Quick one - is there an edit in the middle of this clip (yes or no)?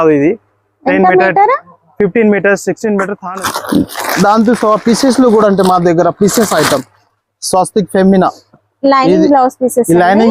yes